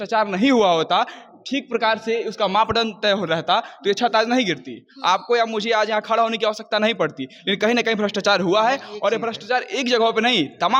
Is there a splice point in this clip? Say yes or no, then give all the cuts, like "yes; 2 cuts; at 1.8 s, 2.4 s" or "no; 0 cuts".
no; 0 cuts